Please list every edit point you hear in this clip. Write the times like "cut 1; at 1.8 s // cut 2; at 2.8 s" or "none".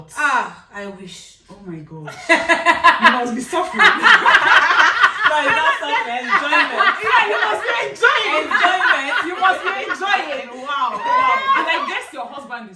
none